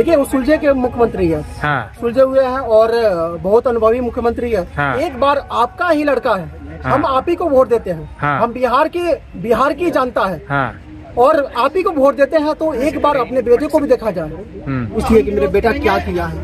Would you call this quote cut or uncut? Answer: cut